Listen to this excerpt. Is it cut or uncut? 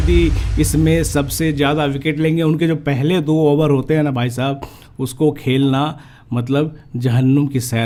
uncut